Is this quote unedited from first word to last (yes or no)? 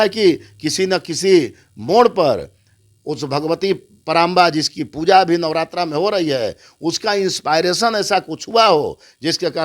yes